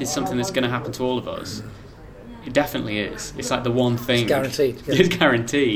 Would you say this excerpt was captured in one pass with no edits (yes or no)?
yes